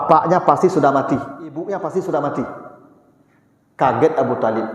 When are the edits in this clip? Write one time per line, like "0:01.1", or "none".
0:01.6